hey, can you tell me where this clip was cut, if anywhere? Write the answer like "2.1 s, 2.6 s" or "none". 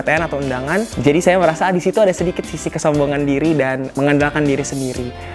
1.0 s